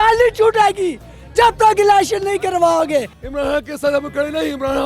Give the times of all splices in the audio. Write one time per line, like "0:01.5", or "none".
0:03.2